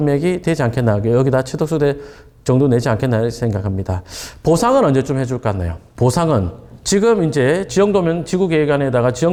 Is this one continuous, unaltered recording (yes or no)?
yes